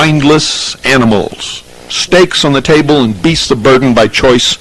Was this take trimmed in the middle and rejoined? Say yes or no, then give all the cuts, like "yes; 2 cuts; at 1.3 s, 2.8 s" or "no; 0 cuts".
no; 0 cuts